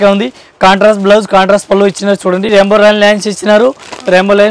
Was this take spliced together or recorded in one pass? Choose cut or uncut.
cut